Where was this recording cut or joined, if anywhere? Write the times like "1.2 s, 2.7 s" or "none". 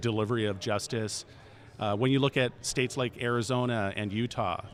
none